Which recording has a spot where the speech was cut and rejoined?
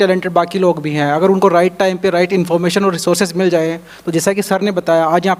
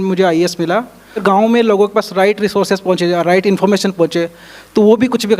second; 1 cut; at 1.2 s

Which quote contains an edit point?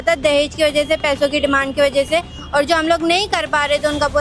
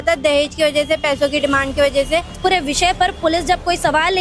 second; 1 cut; at 2.3 s

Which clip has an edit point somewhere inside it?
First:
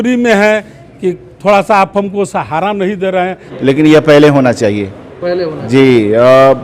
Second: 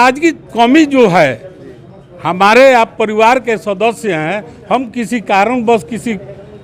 first; 1 cut; at 3.4 s

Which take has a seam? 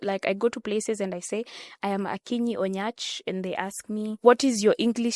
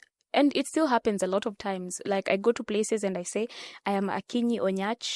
first; 1 cut; at 4.2 s

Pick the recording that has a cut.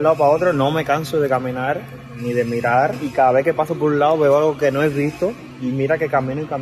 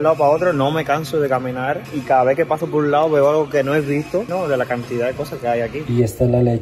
second; 3 cuts; at 1.9 s, 4.3 s, 5.8 s

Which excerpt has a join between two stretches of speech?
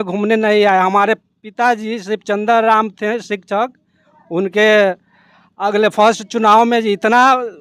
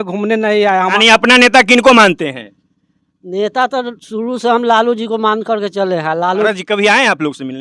second; 2 cuts; at 0.9 s, 6.5 s

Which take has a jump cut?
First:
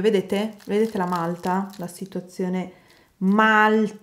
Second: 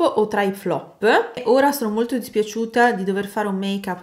second; 1 cut; at 1.4 s

